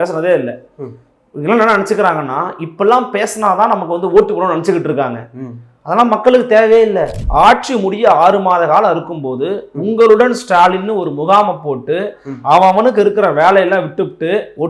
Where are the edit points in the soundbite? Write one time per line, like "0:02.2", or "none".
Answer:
0:07.2